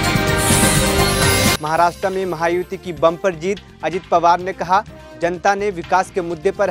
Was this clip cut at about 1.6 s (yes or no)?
yes